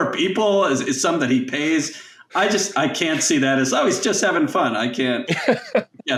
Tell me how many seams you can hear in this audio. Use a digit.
0